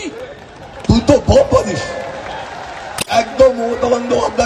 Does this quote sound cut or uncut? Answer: cut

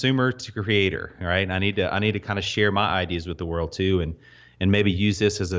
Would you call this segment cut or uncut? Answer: uncut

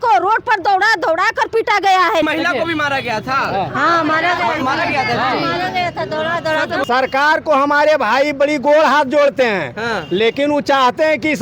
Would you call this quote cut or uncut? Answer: cut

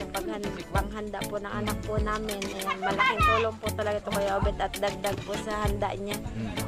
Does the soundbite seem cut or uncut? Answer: uncut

